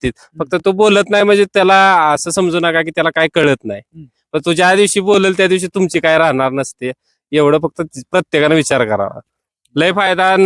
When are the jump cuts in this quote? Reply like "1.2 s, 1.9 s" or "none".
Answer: none